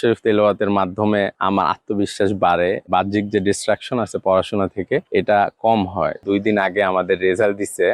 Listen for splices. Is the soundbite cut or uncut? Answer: cut